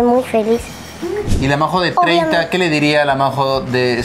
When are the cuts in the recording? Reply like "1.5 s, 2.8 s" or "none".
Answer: 1.3 s